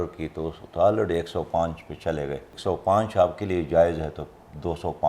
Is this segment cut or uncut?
cut